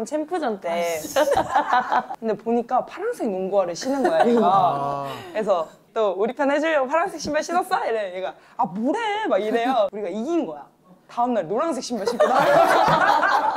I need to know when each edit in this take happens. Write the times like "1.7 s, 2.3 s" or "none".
2.1 s, 9.9 s

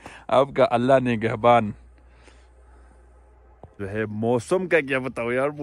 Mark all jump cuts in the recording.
3.8 s

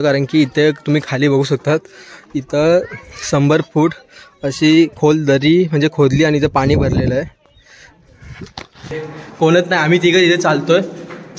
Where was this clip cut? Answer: 9.1 s

